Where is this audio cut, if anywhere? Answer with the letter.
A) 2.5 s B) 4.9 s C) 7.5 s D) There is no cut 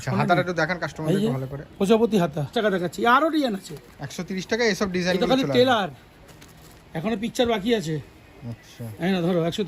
A